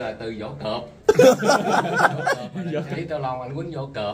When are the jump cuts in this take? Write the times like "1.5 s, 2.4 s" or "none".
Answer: 2.9 s